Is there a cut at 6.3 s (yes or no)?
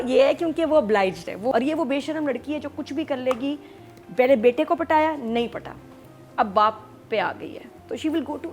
no